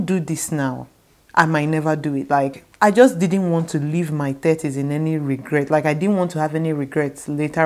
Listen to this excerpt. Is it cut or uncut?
uncut